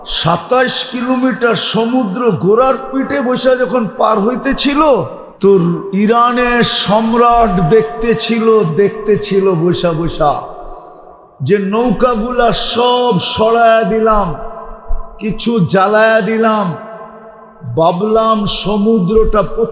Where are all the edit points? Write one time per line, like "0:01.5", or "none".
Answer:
0:05.2
0:05.8